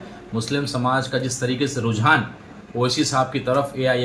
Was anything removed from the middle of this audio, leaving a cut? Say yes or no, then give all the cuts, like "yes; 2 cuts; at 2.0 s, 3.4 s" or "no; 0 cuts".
no; 0 cuts